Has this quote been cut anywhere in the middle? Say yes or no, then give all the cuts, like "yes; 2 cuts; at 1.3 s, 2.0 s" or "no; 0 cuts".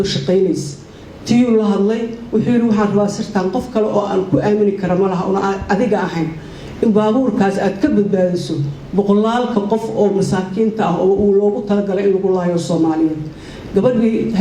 no; 0 cuts